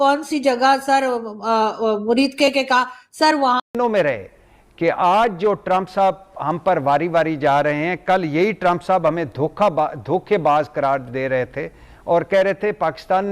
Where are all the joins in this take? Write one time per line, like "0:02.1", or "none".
0:03.8